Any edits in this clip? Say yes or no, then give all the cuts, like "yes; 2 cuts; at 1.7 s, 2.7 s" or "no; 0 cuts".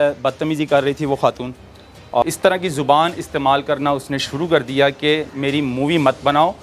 yes; 1 cut; at 2.2 s